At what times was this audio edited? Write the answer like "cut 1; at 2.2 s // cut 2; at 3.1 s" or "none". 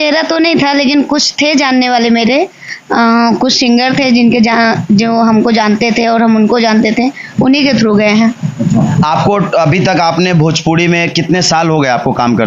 none